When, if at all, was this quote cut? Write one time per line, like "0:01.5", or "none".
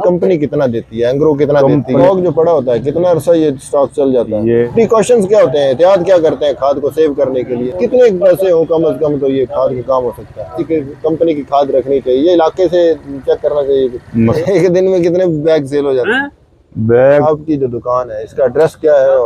0:02.0
0:04.7
0:07.6
0:10.6
0:14.4
0:17.2

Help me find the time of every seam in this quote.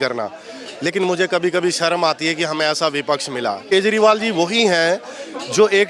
0:03.7

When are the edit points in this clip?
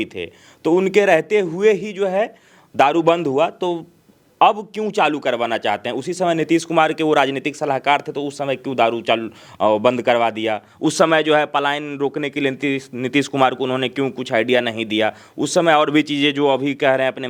none

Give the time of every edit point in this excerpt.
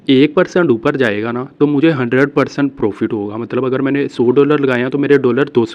none

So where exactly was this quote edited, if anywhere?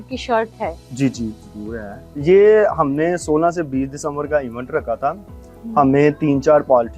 0:02.2

